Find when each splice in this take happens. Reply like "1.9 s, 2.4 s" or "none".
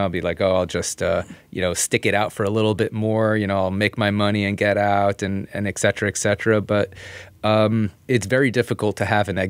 8.1 s